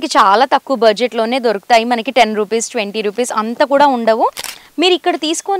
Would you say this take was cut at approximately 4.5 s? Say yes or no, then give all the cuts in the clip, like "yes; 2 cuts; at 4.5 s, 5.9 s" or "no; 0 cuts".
yes; 1 cut; at 4.5 s